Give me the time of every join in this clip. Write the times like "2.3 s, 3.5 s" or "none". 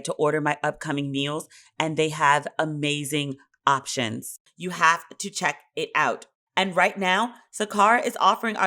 6.3 s